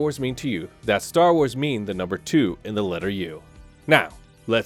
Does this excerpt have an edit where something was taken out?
no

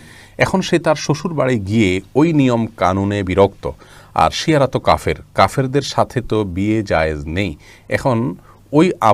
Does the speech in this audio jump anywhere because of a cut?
no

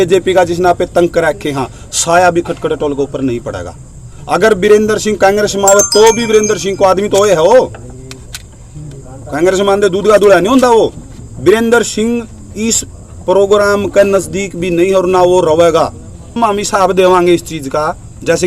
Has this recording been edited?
yes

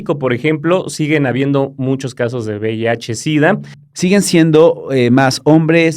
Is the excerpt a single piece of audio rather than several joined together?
no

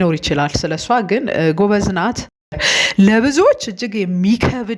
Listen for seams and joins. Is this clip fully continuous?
no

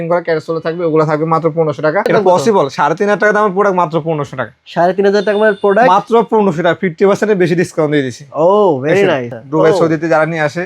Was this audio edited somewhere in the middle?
yes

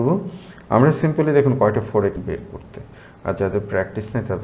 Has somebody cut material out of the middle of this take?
yes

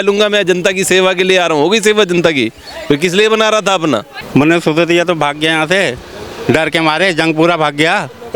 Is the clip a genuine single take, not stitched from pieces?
no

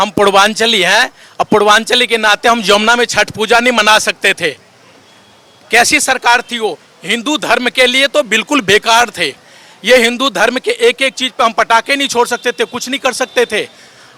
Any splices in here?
no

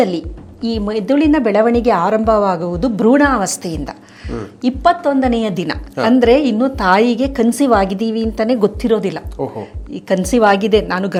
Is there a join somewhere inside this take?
no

